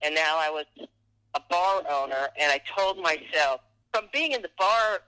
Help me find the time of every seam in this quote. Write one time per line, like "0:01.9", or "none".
0:03.7